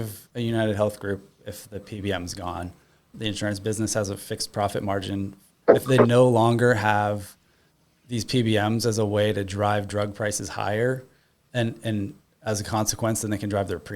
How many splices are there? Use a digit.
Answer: 2